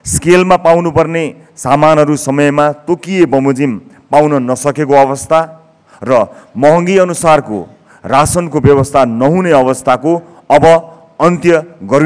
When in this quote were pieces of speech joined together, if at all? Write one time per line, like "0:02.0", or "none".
none